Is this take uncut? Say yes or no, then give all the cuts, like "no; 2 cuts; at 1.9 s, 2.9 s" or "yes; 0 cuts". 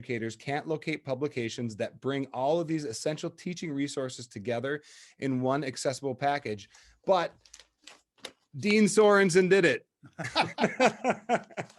yes; 0 cuts